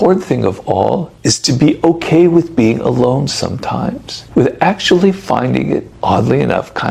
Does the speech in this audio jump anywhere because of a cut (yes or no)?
no